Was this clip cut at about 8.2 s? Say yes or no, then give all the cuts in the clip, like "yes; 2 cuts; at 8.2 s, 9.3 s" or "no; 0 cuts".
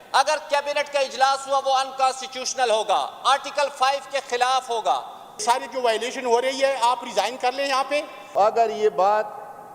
yes; 2 cuts; at 5.4 s, 8.2 s